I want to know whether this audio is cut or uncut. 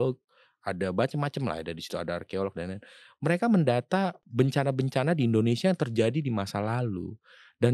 cut